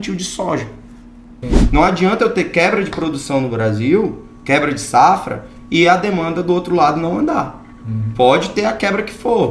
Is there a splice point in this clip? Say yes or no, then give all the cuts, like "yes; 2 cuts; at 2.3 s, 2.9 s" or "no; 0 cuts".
yes; 1 cut; at 1.4 s